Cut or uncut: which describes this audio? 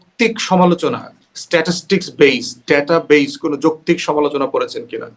uncut